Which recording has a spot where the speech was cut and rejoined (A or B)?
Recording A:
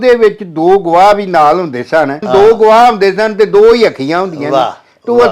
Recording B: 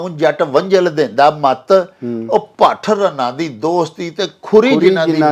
A